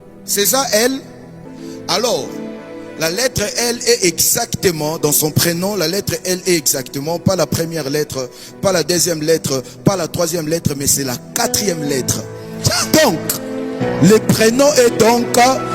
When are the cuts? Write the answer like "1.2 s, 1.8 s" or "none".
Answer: 1.5 s